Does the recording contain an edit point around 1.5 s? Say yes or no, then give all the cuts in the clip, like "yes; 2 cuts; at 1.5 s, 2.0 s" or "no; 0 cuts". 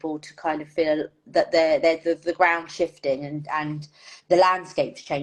no; 0 cuts